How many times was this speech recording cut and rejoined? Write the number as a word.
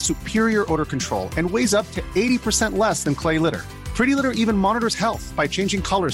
zero